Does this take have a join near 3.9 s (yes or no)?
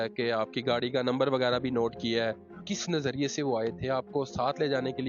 no